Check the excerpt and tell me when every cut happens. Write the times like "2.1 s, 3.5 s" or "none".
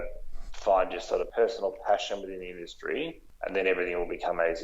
1.3 s, 3.2 s